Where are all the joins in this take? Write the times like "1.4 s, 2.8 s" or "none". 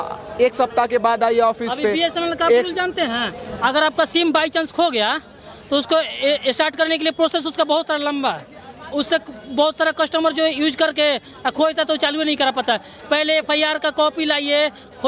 none